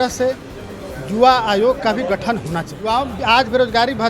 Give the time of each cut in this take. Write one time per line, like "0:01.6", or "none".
0:02.7